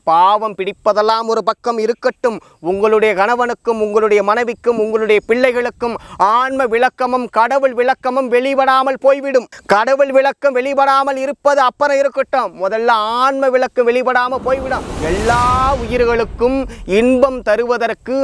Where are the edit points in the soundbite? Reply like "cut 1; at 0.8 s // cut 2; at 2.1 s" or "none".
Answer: cut 1; at 14.8 s